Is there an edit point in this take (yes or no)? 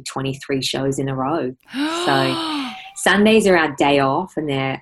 no